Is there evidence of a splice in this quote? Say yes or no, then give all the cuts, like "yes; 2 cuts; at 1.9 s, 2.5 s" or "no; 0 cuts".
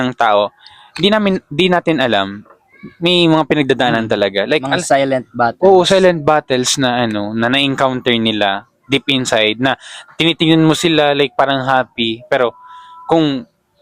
no; 0 cuts